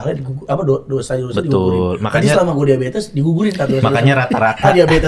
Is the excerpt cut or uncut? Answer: uncut